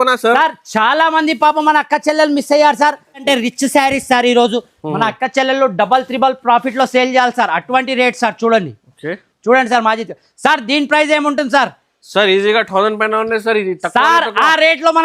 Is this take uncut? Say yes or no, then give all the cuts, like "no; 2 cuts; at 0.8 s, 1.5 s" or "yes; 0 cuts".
no; 1 cut; at 3.2 s